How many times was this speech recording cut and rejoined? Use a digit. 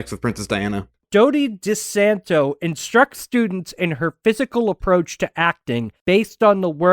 2